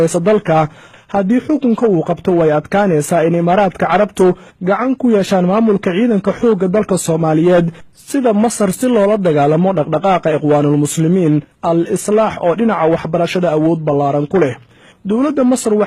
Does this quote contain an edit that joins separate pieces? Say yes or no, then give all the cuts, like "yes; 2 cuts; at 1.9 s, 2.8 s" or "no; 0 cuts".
no; 0 cuts